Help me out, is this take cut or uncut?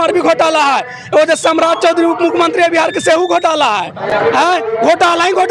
uncut